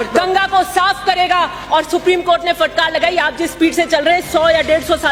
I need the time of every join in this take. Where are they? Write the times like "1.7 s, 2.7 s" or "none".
none